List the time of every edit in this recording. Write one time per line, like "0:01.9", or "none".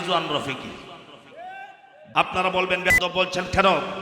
0:02.0